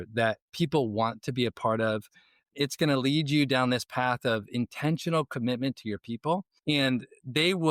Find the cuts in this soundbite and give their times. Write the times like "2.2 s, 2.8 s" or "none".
6.5 s